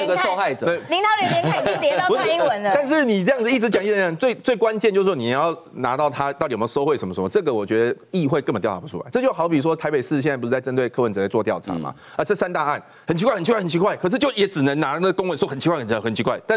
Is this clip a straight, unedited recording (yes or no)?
yes